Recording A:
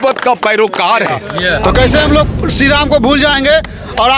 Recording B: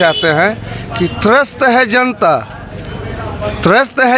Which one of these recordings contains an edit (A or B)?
A